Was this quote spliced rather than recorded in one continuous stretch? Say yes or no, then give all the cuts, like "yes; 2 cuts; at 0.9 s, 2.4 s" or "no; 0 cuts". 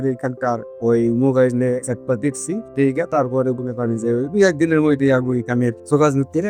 no; 0 cuts